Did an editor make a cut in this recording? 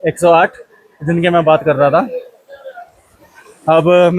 no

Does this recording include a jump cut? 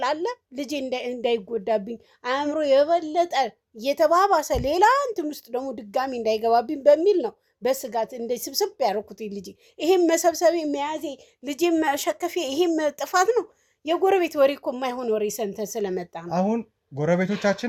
no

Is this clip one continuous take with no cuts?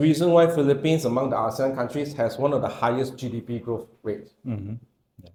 yes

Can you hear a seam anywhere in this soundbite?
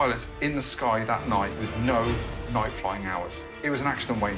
yes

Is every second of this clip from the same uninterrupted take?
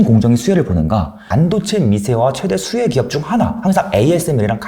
no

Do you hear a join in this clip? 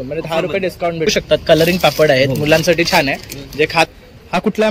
yes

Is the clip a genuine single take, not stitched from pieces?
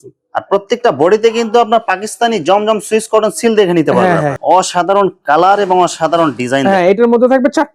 no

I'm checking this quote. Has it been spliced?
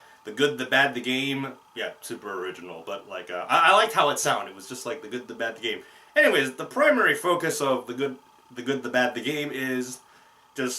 yes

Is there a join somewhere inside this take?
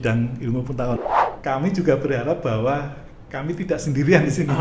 yes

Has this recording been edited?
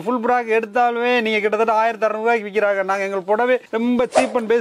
no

